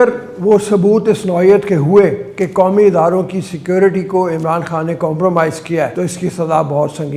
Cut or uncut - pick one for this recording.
cut